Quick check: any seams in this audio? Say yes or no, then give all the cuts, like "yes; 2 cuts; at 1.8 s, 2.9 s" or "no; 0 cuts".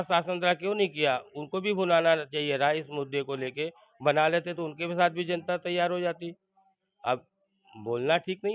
no; 0 cuts